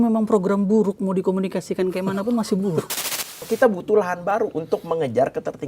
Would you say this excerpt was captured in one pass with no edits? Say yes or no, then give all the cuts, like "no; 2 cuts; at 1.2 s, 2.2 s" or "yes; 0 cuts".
no; 1 cut; at 2.9 s